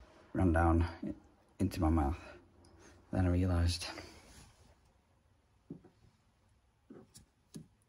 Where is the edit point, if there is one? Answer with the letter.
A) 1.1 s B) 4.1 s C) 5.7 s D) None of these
D